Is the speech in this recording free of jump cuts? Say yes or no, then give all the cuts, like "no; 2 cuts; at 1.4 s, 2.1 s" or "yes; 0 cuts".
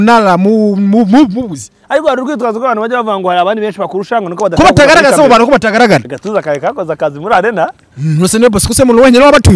no; 1 cut; at 6.1 s